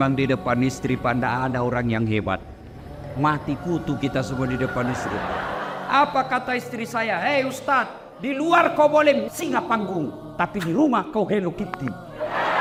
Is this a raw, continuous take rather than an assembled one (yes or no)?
yes